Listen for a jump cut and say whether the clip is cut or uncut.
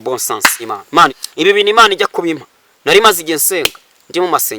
cut